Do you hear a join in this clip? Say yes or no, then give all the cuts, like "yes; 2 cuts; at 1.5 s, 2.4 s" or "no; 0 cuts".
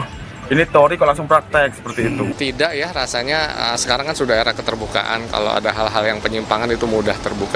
yes; 1 cut; at 2.3 s